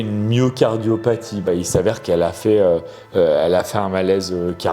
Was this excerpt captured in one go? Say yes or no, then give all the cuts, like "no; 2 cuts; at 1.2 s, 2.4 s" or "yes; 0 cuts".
no; 1 cut; at 1.5 s